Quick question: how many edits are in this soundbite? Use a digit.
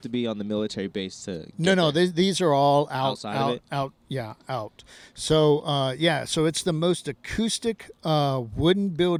0